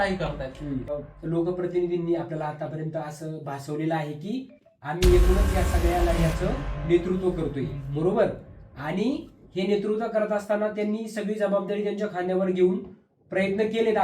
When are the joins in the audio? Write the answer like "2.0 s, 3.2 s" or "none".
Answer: 0.9 s